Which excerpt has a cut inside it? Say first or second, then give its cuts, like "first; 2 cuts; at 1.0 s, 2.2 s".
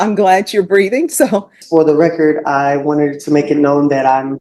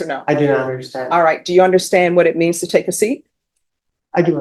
first; 1 cut; at 1.6 s